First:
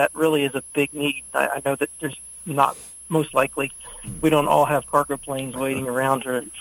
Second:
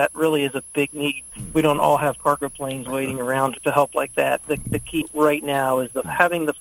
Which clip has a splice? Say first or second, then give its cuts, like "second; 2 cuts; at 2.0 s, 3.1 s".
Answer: second; 3 cuts; at 1.2 s, 3.6 s, 4.6 s